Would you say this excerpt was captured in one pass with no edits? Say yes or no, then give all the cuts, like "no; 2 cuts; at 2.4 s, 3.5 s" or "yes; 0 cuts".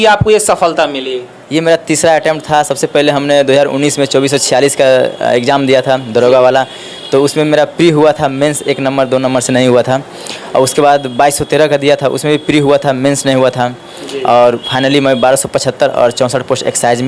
yes; 0 cuts